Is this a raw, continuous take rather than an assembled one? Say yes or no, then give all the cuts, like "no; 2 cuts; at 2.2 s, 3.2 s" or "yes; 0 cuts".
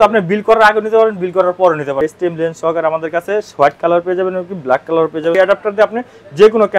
no; 2 cuts; at 2.0 s, 5.4 s